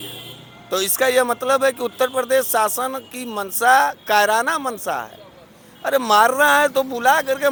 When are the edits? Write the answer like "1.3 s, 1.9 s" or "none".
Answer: none